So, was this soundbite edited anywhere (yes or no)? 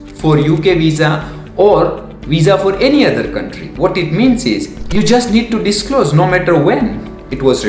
yes